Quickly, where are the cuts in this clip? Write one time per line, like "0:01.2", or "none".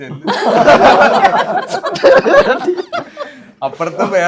none